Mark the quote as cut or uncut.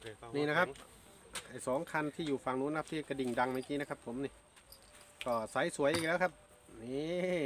uncut